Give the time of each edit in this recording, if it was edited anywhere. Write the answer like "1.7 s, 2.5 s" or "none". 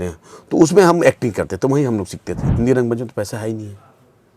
2.4 s